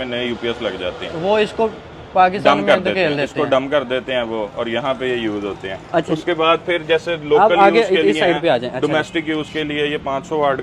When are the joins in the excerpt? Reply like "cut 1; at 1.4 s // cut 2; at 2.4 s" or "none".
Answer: none